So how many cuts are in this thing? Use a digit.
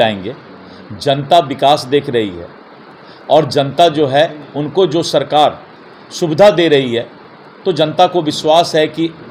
0